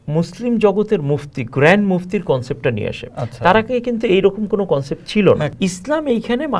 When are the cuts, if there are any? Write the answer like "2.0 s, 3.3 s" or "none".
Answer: 5.5 s